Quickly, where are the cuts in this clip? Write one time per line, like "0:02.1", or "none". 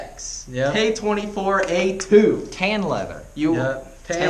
none